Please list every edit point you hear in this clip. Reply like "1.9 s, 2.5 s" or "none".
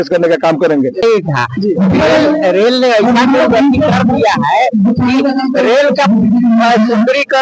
1.0 s